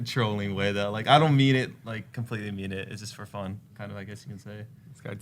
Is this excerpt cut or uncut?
cut